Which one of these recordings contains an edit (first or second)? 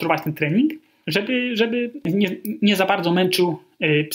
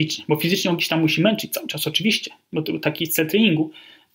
first